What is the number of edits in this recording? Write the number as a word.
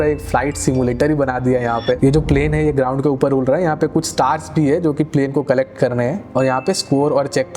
two